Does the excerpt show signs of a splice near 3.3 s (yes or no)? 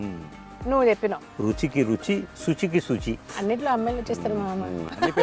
yes